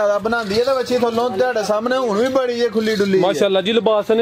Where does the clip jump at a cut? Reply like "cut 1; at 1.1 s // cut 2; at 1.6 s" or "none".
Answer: none